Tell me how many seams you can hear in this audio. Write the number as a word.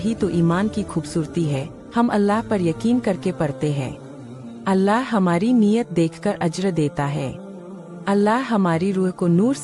one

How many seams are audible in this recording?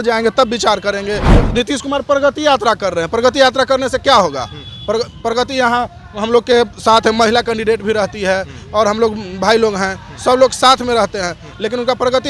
one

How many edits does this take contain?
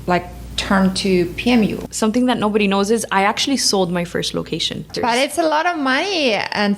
two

